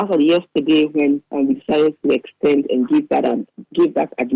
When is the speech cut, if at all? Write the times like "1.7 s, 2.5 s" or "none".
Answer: 1.3 s